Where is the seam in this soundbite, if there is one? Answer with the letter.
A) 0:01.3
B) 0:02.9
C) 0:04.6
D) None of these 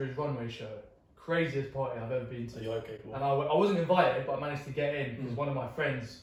D